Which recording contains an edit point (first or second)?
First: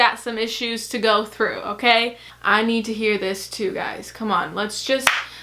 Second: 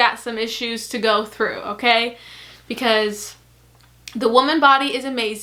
first